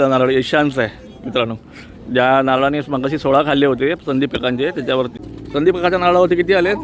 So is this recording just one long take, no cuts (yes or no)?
no